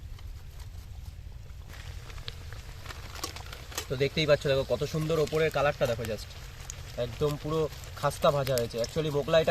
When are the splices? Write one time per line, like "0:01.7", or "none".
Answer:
0:01.5